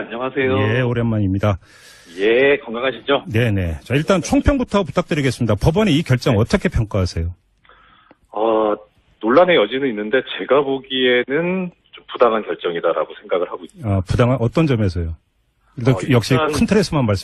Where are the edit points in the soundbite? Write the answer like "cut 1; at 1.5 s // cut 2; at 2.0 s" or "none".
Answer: cut 1; at 6.6 s